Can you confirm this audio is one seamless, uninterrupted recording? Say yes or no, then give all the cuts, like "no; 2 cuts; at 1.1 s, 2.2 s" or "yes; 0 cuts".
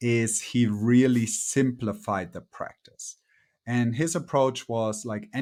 yes; 0 cuts